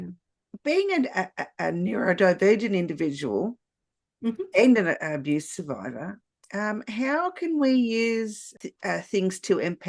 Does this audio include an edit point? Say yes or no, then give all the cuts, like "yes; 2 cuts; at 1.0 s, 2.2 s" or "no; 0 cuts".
yes; 1 cut; at 8.4 s